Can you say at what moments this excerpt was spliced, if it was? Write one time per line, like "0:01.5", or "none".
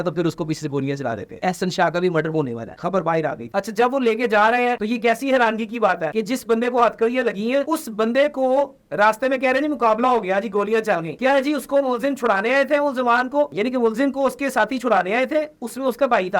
0:01.4